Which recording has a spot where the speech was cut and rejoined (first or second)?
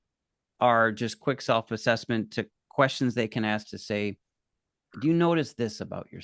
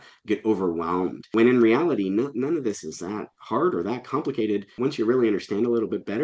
second